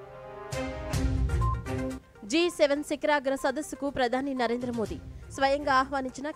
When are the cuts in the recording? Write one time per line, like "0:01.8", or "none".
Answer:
0:00.9

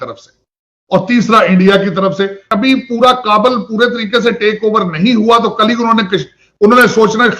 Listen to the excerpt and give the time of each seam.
0:02.5

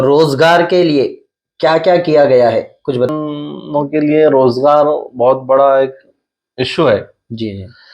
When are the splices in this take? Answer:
0:03.1

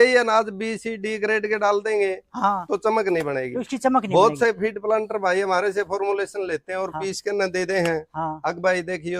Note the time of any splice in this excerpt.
none

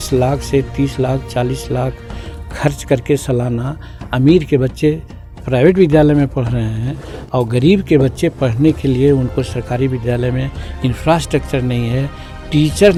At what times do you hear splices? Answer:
none

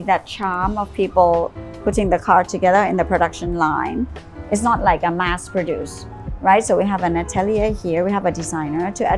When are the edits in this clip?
0:04.2

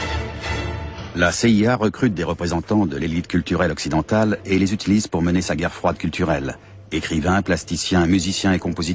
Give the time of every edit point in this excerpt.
0:02.7

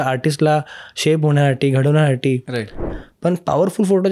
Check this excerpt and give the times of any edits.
0:02.8

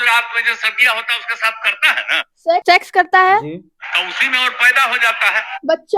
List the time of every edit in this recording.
0:02.6

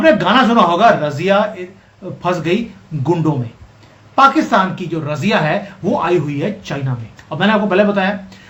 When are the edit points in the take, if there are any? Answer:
none

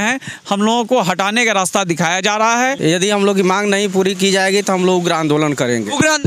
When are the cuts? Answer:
0:02.8

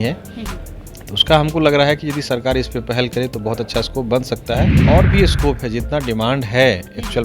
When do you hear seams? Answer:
0:04.8

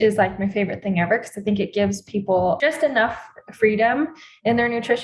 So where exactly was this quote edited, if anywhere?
0:02.6

